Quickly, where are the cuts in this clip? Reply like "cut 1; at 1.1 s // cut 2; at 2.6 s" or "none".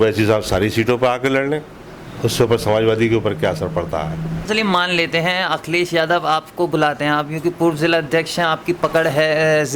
cut 1; at 4.5 s